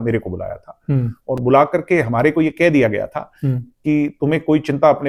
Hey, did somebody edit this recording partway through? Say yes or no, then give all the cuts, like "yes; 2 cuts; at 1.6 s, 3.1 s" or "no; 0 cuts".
no; 0 cuts